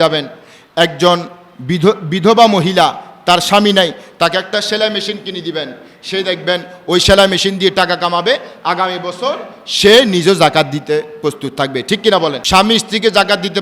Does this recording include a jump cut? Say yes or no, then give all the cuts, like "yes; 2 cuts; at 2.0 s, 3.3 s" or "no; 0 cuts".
yes; 1 cut; at 12.4 s